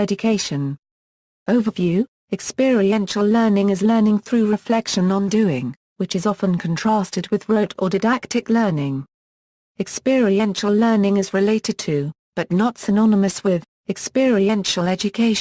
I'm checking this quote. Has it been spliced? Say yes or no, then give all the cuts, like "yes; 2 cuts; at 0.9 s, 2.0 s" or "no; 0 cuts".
no; 0 cuts